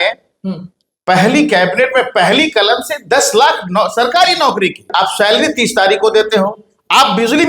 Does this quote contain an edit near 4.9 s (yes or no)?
yes